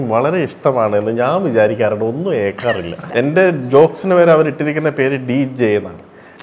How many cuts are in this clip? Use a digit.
1